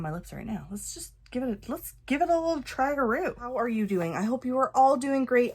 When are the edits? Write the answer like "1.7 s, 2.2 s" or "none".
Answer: 3.5 s